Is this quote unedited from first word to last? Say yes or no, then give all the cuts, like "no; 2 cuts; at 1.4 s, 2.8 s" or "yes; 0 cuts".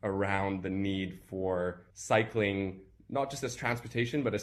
yes; 0 cuts